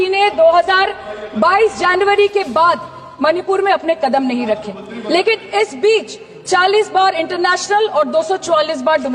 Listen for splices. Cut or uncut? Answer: uncut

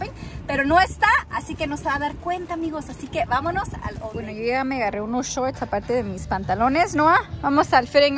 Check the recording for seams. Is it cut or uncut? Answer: cut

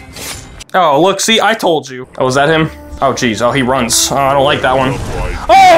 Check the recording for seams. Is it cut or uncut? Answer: cut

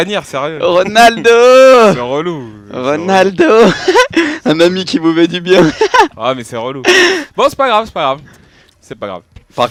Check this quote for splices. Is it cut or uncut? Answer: uncut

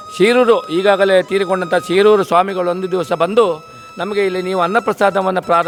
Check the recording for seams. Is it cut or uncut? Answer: uncut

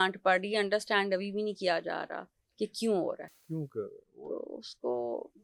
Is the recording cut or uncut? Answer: uncut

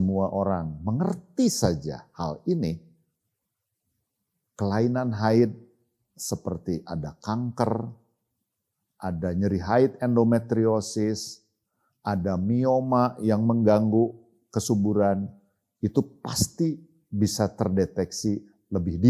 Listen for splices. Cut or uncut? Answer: uncut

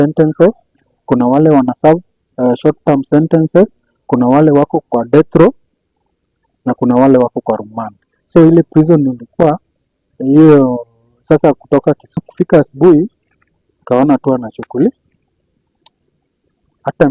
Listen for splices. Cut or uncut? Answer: cut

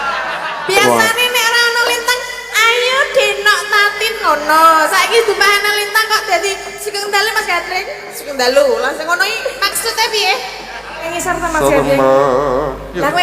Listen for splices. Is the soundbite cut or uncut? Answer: cut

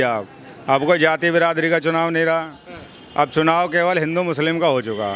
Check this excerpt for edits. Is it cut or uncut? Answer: uncut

